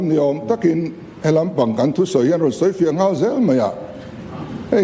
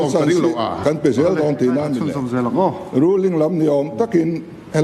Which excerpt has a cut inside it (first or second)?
second